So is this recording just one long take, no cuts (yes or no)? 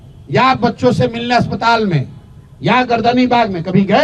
yes